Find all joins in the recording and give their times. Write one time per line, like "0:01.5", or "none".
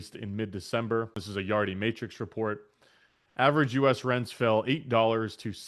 0:01.2

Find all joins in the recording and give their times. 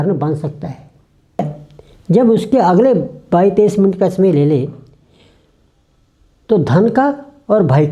0:01.4

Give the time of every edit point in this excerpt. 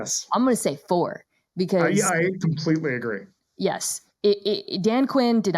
0:03.6

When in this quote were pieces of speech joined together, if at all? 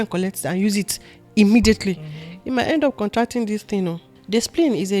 0:04.1

